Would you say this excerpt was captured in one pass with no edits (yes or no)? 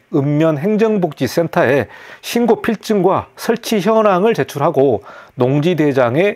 yes